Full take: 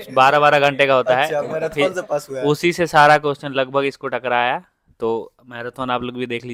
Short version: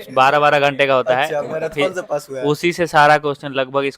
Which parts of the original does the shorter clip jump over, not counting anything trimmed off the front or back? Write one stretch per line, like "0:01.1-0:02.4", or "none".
none